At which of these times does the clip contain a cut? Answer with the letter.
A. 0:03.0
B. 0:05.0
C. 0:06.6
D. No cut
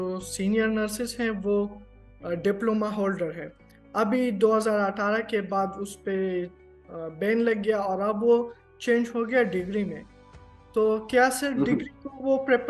D